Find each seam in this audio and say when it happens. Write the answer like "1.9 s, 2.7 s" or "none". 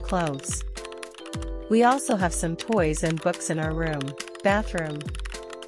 4.2 s

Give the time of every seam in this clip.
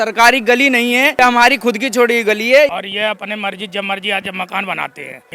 1.1 s, 2.7 s

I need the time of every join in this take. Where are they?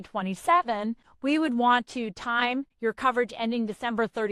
1.1 s, 2.7 s

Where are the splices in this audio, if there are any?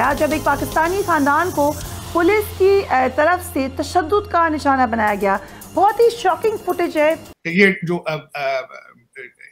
7.2 s

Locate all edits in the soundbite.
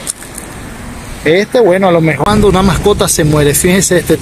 2.3 s

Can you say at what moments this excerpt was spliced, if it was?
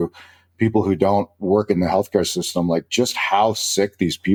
none

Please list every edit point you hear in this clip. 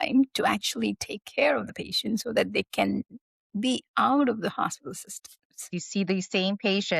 5.8 s

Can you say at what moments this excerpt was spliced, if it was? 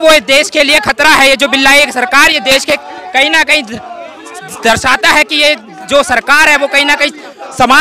none

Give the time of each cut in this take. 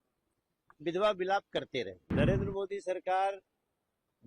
2.0 s

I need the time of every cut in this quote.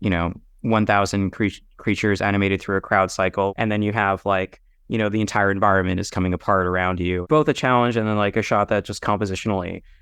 3.5 s, 7.2 s

